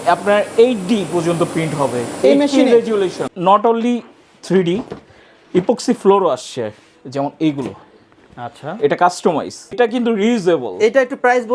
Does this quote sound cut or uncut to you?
cut